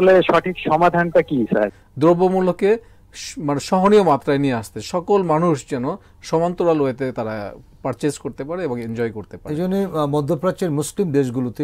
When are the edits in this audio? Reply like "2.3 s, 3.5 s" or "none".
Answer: 1.8 s